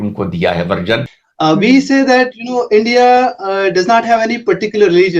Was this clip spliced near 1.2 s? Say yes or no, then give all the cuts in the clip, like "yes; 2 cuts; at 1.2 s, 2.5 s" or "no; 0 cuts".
yes; 1 cut; at 1.2 s